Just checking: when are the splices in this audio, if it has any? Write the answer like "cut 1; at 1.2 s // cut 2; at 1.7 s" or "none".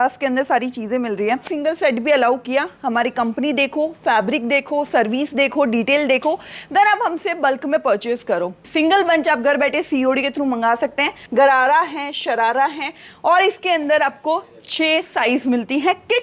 cut 1; at 1.5 s // cut 2; at 8.6 s // cut 3; at 11.2 s